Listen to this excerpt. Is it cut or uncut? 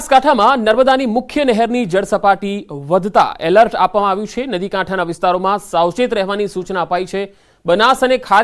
cut